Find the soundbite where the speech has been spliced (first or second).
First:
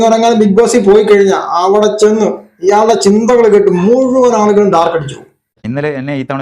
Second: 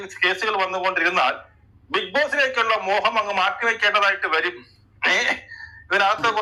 first